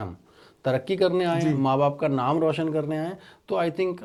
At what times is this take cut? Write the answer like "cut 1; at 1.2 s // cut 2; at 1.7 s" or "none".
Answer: none